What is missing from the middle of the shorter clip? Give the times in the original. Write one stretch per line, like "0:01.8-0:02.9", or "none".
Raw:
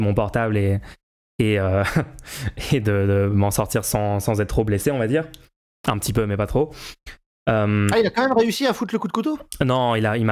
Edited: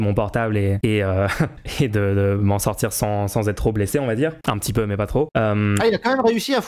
0:00.8-0:01.3
0:02.2-0:02.5
0:05.3-0:05.8
0:06.7-0:07.4